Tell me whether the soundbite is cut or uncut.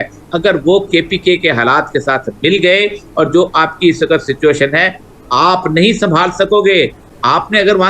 uncut